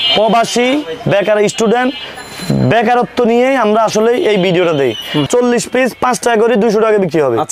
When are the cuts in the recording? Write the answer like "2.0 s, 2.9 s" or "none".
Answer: 5.3 s

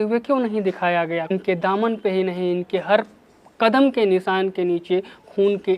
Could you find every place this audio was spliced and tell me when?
1.3 s

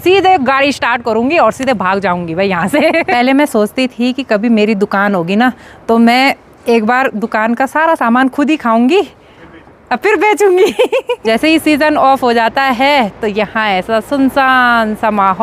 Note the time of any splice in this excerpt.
3.1 s, 11.1 s

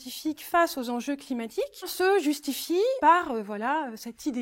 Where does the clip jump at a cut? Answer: 1.9 s, 3.0 s

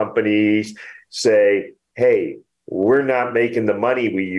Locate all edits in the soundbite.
none

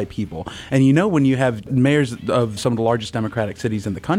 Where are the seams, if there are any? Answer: 1.7 s, 2.6 s

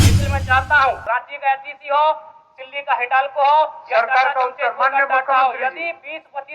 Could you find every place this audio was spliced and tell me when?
1.0 s

